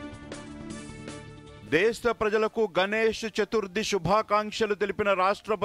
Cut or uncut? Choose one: cut